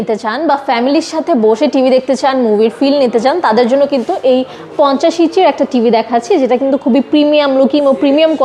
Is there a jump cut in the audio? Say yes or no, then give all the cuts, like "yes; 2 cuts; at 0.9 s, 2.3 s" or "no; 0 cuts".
no; 0 cuts